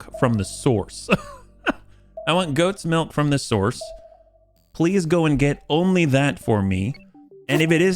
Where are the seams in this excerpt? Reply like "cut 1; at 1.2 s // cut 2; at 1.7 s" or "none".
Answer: none